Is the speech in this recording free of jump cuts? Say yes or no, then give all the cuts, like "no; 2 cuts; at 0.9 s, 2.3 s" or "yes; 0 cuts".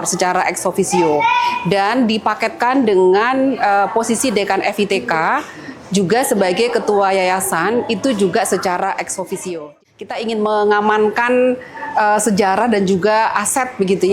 no; 1 cut; at 9.8 s